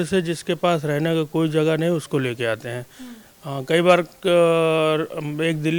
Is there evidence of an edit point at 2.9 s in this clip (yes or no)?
no